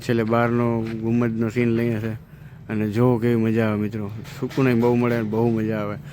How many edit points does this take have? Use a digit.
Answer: 0